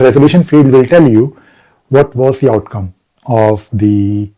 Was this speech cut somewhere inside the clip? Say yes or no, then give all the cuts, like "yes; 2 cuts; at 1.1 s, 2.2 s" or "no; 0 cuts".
no; 0 cuts